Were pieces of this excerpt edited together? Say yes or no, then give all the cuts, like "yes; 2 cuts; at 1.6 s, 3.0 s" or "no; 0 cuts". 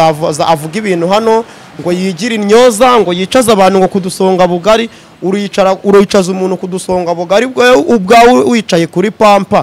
no; 0 cuts